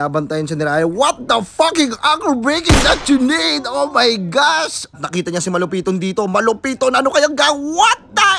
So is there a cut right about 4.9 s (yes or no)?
yes